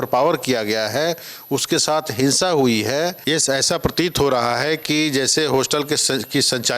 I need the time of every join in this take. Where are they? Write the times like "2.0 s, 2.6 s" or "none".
3.2 s